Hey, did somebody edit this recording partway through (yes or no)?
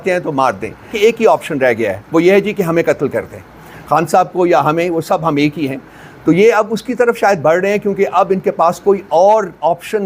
yes